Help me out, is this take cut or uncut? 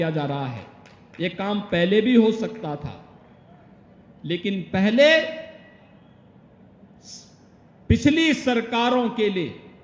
uncut